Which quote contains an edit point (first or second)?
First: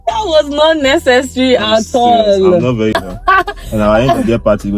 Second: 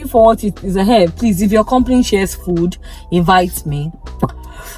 first